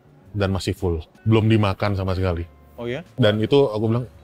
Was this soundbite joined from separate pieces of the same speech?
yes; 2 cuts; at 1.1 s, 3.1 s

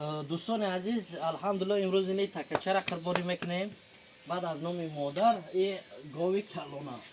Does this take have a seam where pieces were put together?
no; 0 cuts

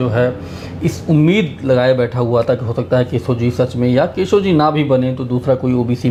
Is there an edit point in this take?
no; 0 cuts

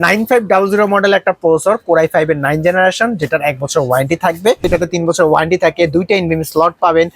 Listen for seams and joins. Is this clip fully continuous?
no; 1 cut; at 4.6 s

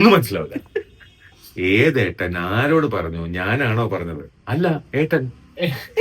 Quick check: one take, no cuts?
yes; 0 cuts

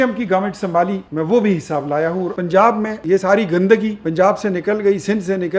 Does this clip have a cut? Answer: yes; 4 cuts; at 1.0 s, 2.4 s, 3.0 s, 4.0 s

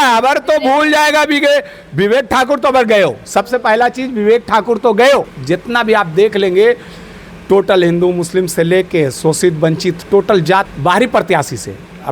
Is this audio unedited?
no; 2 cuts; at 5.3 s, 10.7 s

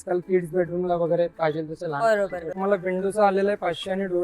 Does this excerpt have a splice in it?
yes; 1 cut; at 2.5 s

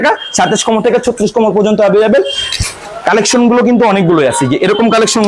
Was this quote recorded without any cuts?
yes; 0 cuts

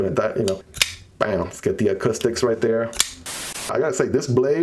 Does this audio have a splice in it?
yes; 1 cut; at 3.7 s

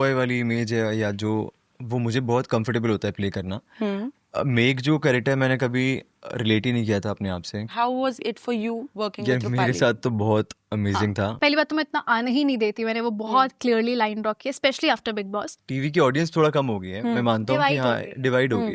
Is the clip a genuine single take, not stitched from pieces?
no; 3 cuts; at 7.7 s, 11.3 s, 15.6 s

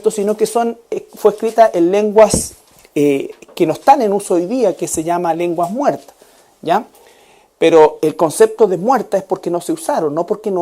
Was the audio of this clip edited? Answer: yes; 1 cut; at 3.4 s

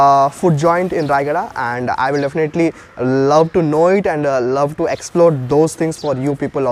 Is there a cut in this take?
no; 0 cuts

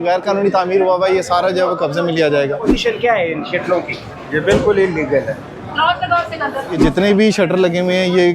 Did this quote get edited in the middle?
yes; 2 cuts; at 2.6 s, 6.8 s

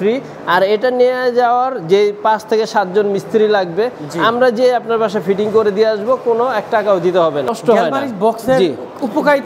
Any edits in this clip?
yes; 1 cut; at 7.6 s

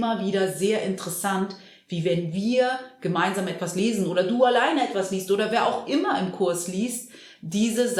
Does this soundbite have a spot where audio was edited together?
no; 0 cuts

